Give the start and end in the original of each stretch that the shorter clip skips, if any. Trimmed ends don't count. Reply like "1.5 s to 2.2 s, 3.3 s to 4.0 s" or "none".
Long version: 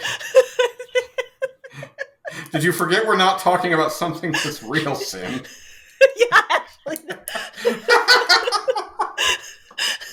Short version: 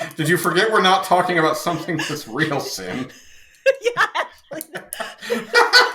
none